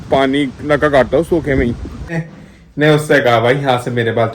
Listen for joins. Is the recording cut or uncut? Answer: cut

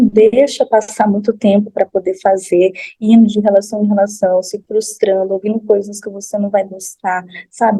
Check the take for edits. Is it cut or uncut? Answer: uncut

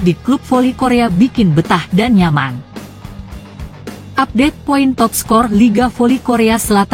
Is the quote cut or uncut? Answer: cut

